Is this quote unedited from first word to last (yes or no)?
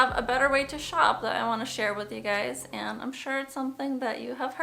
yes